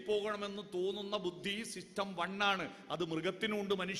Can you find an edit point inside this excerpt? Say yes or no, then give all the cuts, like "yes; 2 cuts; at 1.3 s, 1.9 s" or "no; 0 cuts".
no; 0 cuts